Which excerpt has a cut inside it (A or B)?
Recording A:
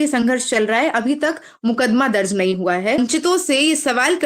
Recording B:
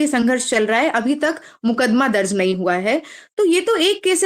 A